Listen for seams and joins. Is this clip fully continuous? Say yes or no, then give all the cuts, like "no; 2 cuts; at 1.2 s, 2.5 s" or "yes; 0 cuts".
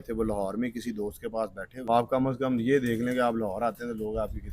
no; 1 cut; at 1.9 s